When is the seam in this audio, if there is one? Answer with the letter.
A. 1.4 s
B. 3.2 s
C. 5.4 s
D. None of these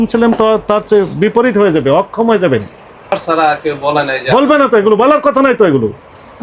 B